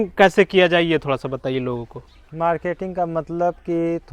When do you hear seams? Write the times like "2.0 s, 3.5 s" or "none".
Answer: none